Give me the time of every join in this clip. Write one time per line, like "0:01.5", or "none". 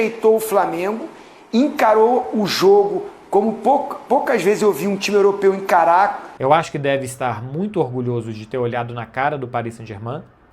0:06.3

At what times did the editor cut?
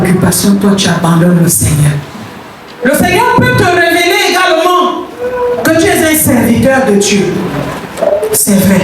0:02.8

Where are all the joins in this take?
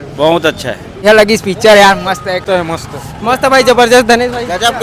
0:01.0
0:02.4

